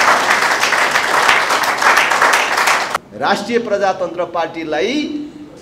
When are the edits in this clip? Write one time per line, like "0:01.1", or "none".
none